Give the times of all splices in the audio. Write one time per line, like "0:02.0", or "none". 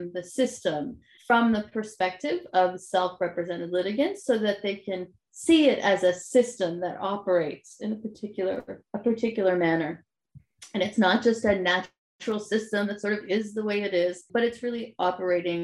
0:01.1
0:14.2